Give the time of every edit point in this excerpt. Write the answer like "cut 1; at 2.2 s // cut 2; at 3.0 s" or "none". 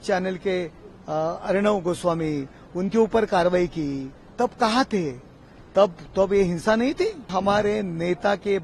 cut 1; at 7.3 s